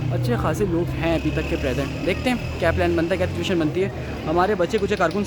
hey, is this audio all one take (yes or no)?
yes